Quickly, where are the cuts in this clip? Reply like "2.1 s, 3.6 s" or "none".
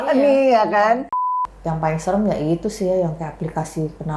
1.2 s